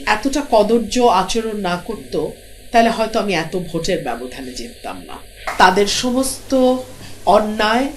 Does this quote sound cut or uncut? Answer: cut